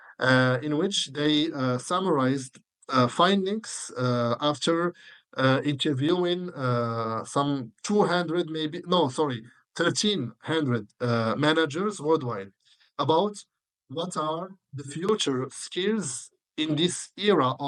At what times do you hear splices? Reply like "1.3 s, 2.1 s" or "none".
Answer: none